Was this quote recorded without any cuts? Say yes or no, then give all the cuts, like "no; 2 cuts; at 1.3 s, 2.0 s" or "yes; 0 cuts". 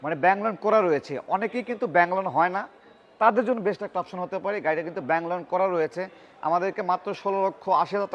yes; 0 cuts